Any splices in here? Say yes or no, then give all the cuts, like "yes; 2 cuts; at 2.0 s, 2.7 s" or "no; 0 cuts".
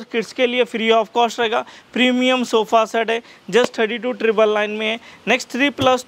no; 0 cuts